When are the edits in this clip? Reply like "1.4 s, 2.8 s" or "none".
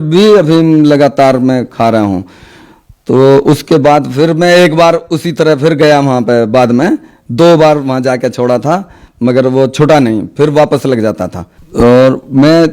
11.6 s